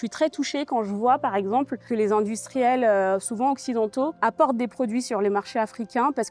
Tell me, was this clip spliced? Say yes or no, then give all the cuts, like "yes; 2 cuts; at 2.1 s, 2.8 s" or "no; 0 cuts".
no; 0 cuts